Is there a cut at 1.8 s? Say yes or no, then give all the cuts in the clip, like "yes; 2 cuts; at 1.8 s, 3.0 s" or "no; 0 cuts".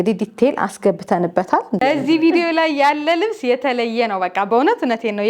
yes; 1 cut; at 1.8 s